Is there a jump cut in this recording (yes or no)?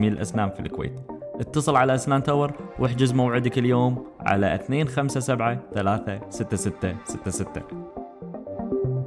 yes